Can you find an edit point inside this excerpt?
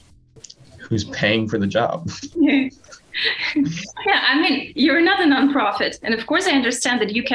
no; 0 cuts

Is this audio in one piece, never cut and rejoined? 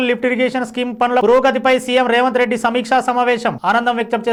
yes; 0 cuts

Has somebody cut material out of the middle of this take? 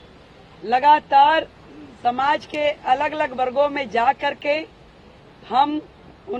no; 0 cuts

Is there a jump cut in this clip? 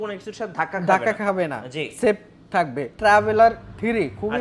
yes; 1 cut; at 2.9 s

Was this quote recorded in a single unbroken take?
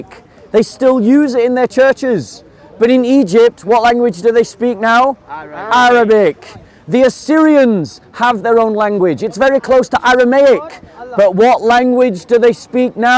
yes; 0 cuts

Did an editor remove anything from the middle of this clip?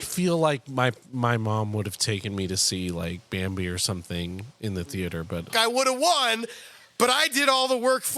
yes; 1 cut; at 5.5 s

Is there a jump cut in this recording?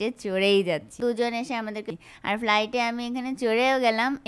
yes; 2 cuts; at 1.0 s, 1.9 s

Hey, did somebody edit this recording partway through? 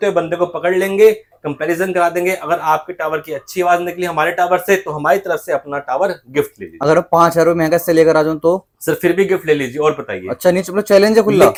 no; 0 cuts

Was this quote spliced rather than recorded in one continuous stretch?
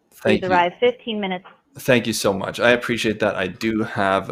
no; 0 cuts

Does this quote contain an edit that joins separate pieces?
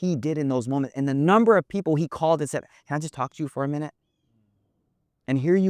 no; 0 cuts

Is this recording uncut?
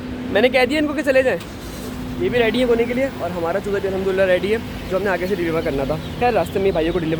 yes; 0 cuts

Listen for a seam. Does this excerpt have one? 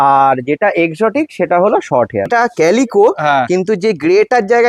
yes; 1 cut; at 2.3 s

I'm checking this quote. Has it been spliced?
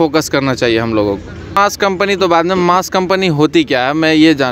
yes; 1 cut; at 1.6 s

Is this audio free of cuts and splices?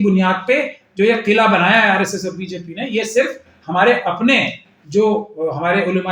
yes; 0 cuts

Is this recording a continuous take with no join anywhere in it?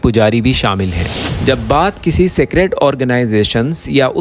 no; 1 cut; at 1.2 s

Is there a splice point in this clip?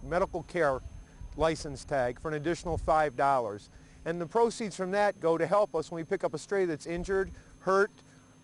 no; 0 cuts

